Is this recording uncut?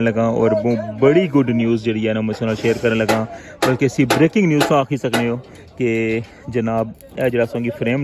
yes; 0 cuts

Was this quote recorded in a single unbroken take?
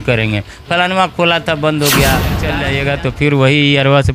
no; 1 cut; at 2.6 s

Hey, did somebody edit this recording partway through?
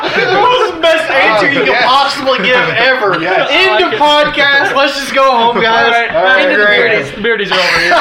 no; 0 cuts

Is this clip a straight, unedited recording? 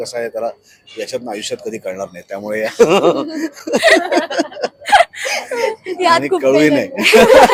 yes; 0 cuts

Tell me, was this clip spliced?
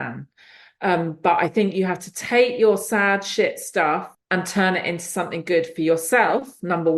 yes; 1 cut; at 4.2 s

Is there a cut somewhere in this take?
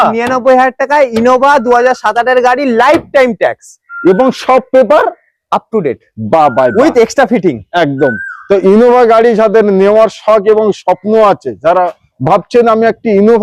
no; 0 cuts

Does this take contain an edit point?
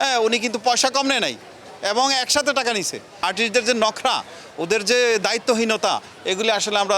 yes; 1 cut; at 3.2 s

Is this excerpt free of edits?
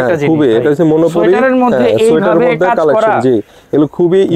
yes; 0 cuts

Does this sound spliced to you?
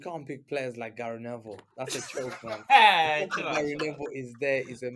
no; 0 cuts

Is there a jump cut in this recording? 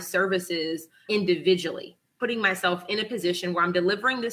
yes; 2 cuts; at 1.0 s, 2.1 s

